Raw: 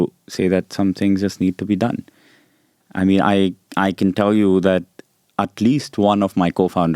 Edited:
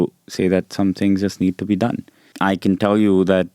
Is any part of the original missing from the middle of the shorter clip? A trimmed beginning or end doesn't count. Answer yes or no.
yes